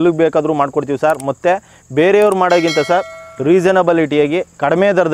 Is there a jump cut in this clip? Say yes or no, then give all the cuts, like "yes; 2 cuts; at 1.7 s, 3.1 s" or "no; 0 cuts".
no; 0 cuts